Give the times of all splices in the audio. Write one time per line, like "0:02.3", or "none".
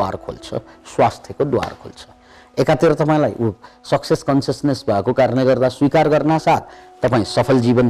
none